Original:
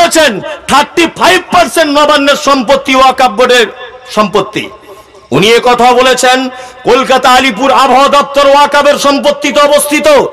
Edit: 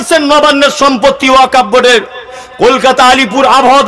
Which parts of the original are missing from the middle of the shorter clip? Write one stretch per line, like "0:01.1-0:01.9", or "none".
0:04.0-0:06.6